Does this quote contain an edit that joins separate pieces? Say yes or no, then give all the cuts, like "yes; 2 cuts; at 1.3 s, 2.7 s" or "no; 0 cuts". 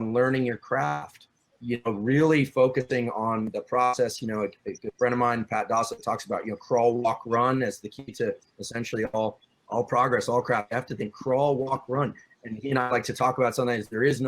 yes; 3 cuts; at 1.5 s, 9.5 s, 12.3 s